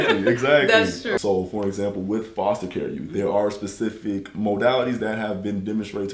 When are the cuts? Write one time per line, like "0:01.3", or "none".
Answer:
0:01.2